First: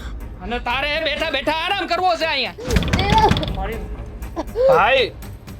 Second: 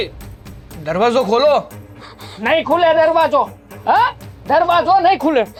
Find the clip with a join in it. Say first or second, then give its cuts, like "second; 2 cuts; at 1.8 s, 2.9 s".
first; 1 cut; at 2.6 s